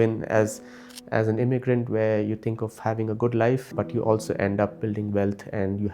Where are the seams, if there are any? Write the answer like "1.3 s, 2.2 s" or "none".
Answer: 3.7 s